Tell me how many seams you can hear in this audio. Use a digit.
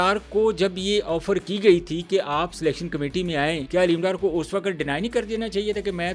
1